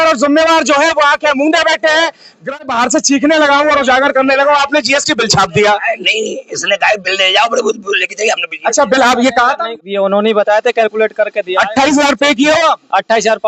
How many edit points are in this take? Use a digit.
2